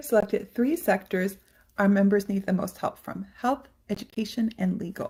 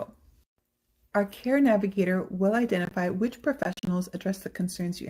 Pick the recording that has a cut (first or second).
second